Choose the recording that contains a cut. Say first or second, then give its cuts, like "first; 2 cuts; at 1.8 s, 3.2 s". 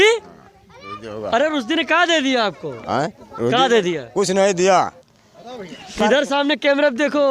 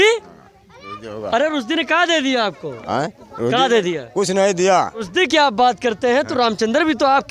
first; 1 cut; at 5.0 s